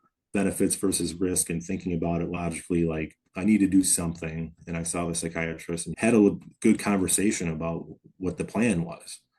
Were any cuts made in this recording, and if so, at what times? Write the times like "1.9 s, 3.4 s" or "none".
5.9 s